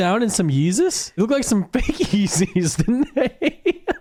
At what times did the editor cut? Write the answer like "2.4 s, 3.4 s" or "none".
none